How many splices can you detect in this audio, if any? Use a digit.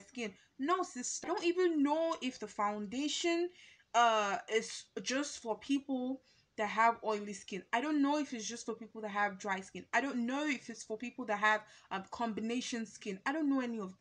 1